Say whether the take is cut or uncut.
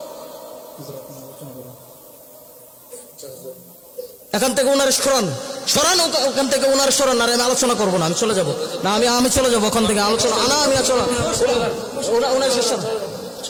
uncut